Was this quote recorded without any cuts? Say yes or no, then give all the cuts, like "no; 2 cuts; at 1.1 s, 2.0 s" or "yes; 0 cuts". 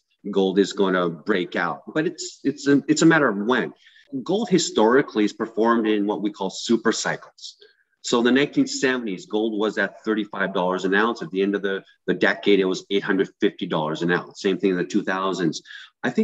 no; 1 cut; at 4.1 s